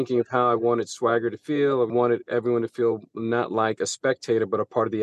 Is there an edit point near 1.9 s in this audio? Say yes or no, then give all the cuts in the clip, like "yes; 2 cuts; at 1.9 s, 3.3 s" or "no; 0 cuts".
yes; 1 cut; at 1.9 s